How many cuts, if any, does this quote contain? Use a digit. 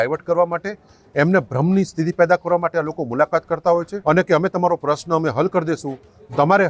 1